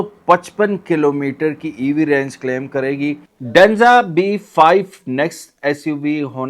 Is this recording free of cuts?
no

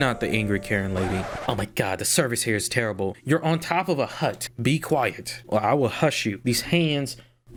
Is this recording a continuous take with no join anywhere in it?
yes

